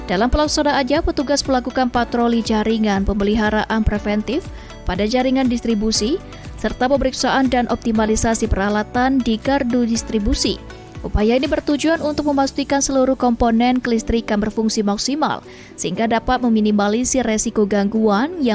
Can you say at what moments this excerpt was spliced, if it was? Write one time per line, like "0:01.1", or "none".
none